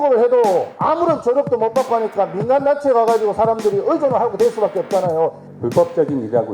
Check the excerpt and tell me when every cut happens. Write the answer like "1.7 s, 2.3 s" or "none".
5.5 s